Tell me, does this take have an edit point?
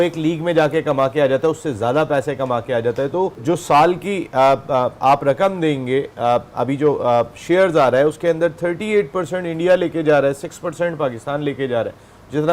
yes; 1 cut; at 3.4 s

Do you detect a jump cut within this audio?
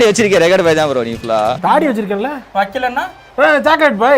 yes; 1 cut; at 1.6 s

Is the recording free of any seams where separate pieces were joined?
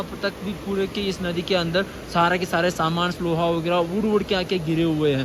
yes; 0 cuts

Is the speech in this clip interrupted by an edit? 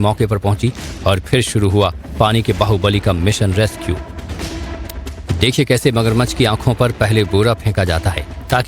no; 0 cuts

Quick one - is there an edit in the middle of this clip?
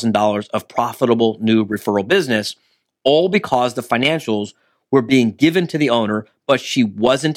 no; 0 cuts

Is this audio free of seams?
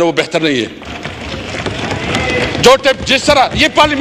yes; 0 cuts

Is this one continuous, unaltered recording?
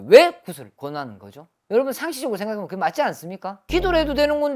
yes; 0 cuts

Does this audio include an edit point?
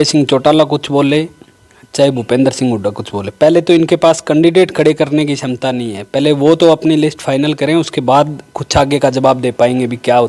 no; 0 cuts

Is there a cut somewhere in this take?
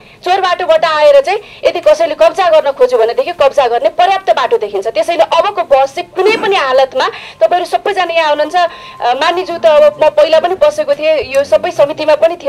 no; 0 cuts

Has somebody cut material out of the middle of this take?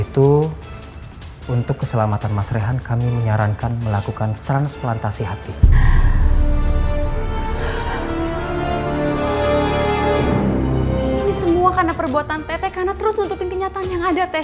yes; 1 cut; at 11.2 s

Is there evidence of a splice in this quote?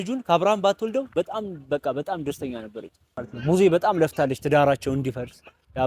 yes; 1 cut; at 3.3 s

